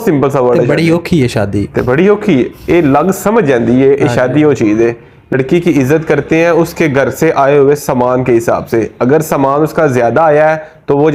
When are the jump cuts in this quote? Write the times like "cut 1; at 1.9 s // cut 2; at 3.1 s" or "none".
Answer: cut 1; at 5.3 s